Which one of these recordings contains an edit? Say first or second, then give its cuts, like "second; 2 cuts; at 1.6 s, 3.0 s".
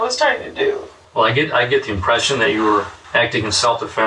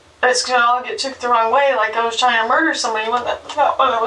first; 2 cuts; at 1.0 s, 3.0 s